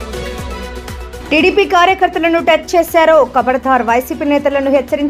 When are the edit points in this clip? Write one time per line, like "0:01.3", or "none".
0:01.1